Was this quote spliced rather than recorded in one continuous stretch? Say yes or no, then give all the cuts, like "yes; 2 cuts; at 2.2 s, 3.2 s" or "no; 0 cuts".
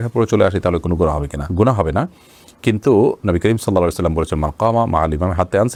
no; 0 cuts